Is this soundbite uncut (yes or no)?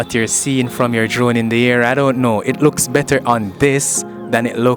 yes